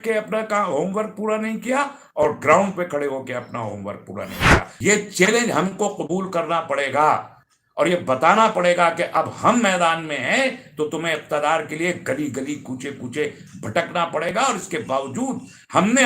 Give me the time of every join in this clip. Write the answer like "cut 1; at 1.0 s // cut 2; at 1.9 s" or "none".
cut 1; at 4.7 s